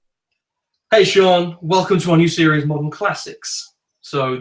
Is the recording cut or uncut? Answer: uncut